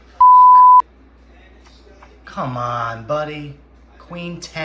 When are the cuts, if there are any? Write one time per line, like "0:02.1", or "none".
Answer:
0:00.9

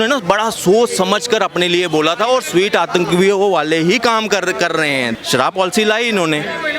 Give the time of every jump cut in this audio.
0:05.1

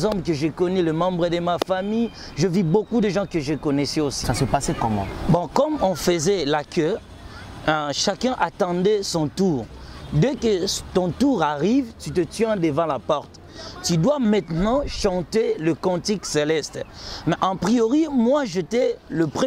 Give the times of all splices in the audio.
0:04.2

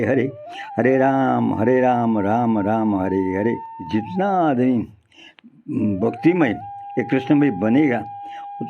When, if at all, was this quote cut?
0:03.7

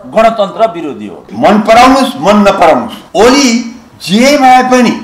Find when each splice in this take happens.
0:01.3
0:03.0

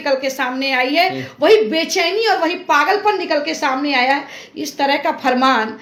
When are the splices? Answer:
none

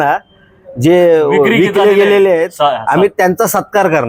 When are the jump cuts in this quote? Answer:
none

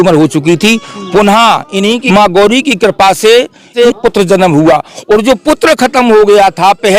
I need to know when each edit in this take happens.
0:02.0
0:03.7

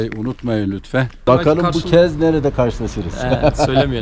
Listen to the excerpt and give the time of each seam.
0:01.2

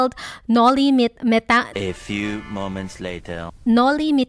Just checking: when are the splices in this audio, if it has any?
none

